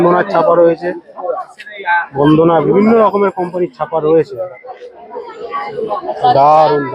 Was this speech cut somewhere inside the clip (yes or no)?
yes